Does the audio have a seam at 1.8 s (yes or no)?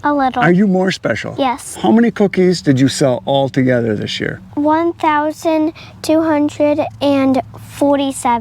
yes